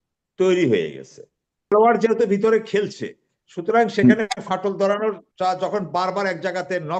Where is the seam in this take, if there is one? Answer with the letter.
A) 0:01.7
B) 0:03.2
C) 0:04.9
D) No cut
D